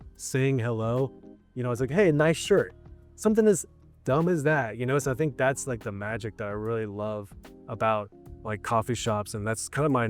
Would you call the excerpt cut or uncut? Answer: uncut